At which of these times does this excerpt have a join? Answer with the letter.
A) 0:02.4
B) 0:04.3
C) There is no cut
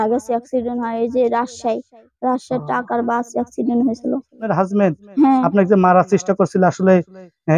B